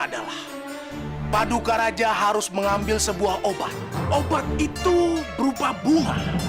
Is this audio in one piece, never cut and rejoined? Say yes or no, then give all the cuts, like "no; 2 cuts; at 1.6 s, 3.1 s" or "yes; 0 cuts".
yes; 0 cuts